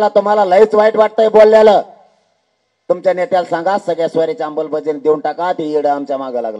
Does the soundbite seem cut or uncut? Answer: uncut